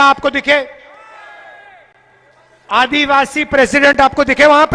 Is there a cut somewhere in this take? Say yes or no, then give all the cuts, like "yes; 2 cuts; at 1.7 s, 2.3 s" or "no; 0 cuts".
no; 0 cuts